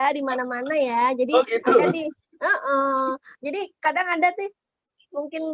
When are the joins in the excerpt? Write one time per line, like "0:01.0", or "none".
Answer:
none